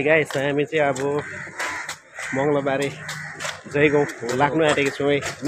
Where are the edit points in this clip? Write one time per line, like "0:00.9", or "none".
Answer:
none